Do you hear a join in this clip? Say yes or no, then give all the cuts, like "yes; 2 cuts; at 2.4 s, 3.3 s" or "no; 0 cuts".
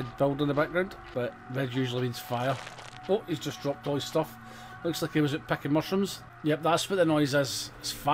yes; 2 cuts; at 1.0 s, 6.2 s